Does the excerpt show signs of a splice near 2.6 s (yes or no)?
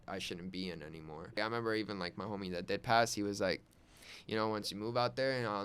no